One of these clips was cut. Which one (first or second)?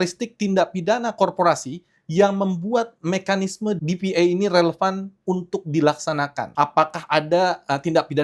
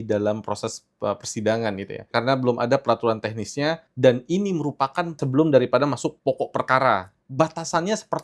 second